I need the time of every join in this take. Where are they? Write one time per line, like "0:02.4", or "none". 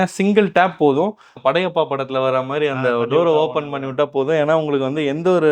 0:01.3